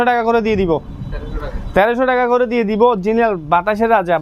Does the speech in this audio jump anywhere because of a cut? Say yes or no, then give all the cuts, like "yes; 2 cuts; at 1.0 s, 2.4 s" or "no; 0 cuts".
no; 0 cuts